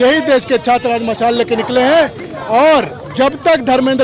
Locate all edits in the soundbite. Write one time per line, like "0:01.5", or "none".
none

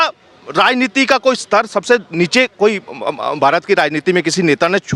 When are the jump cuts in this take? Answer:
none

